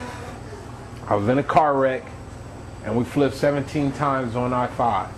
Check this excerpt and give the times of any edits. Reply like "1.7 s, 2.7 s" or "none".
none